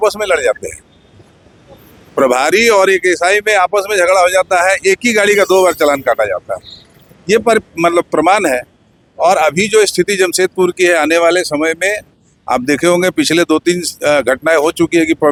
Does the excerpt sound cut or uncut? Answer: uncut